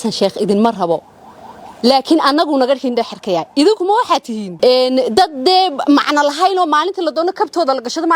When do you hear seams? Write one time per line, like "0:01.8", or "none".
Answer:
none